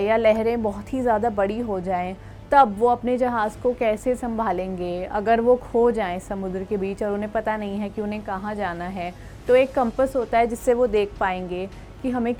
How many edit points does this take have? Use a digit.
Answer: 0